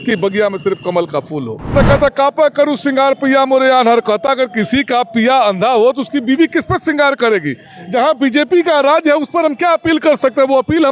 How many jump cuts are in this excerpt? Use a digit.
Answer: 1